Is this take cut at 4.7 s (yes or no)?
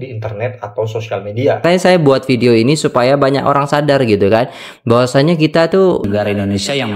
no